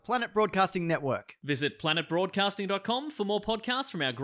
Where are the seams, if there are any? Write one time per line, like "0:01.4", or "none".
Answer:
none